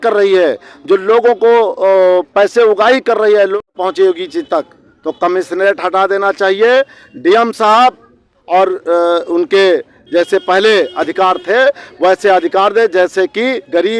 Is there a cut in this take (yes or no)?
yes